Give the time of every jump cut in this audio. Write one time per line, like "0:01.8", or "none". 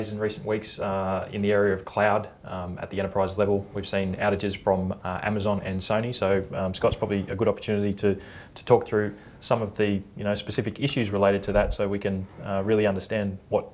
none